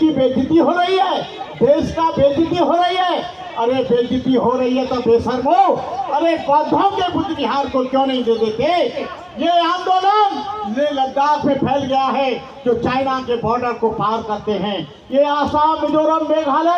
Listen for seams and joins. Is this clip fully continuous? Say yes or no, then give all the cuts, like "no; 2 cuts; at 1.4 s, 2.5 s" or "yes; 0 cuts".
no; 1 cut; at 9.1 s